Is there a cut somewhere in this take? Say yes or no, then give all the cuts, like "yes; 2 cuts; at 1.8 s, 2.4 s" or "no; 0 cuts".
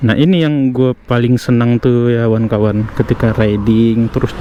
no; 0 cuts